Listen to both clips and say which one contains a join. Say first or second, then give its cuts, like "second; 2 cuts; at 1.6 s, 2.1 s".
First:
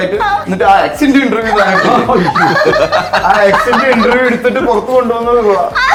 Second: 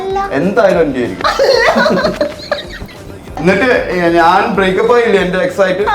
second; 1 cut; at 3.4 s